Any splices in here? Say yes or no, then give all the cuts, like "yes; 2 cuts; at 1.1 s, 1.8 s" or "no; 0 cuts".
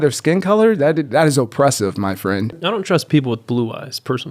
yes; 1 cut; at 2.6 s